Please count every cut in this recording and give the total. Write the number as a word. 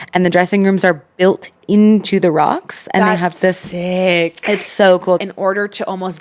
one